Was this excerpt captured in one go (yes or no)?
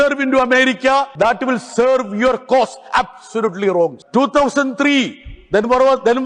no